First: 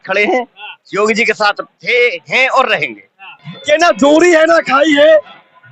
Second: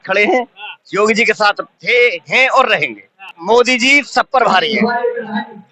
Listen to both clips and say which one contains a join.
first; 1 cut; at 3.3 s

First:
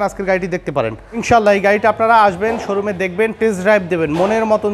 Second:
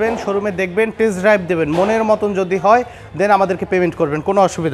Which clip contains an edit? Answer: first; 1 cut; at 1.2 s

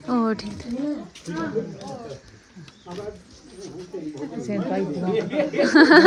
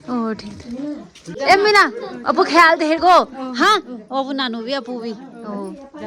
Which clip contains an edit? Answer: second; 1 cut; at 1.3 s

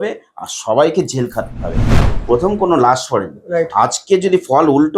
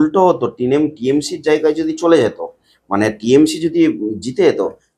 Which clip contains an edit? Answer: first; 1 cut; at 2.0 s

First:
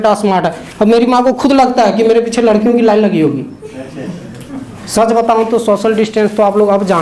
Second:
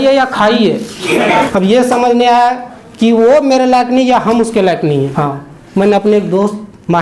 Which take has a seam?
second; 2 cuts; at 1.5 s, 5.1 s

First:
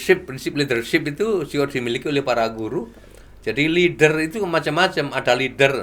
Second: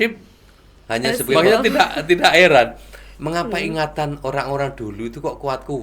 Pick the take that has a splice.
second; 1 cut; at 1.2 s

